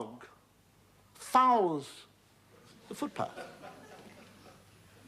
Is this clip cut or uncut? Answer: cut